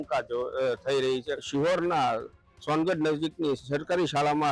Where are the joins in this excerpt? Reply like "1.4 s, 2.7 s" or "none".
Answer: 1.4 s